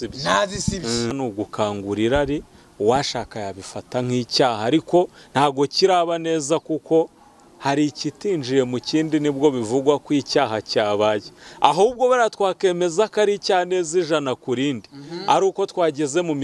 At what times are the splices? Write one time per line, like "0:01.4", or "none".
0:01.1